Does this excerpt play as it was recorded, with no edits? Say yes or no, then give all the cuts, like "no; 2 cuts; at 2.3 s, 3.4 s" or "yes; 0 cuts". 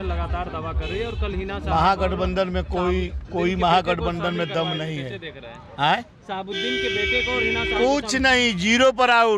yes; 0 cuts